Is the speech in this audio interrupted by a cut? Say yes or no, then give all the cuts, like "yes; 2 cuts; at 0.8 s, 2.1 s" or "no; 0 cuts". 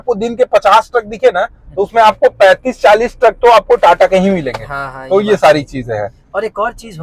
no; 0 cuts